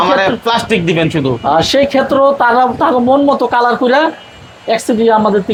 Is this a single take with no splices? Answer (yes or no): yes